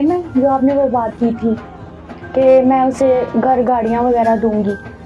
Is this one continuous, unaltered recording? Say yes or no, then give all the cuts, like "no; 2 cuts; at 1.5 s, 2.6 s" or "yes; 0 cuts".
yes; 0 cuts